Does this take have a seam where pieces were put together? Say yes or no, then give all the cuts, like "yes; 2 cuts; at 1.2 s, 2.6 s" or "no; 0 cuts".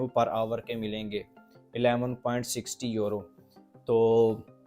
no; 0 cuts